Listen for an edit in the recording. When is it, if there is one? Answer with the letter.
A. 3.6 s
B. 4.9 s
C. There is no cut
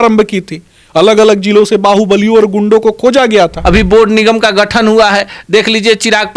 A